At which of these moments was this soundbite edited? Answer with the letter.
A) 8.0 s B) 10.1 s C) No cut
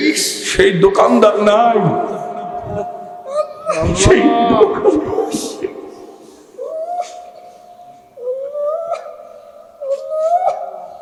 C